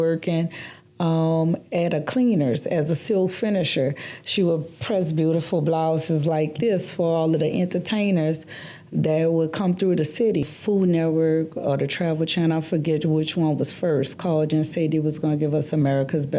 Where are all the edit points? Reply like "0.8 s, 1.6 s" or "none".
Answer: 10.5 s